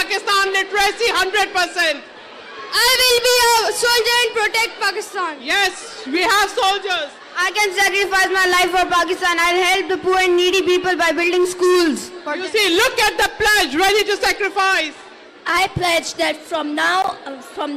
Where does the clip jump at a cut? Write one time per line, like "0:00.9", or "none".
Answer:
none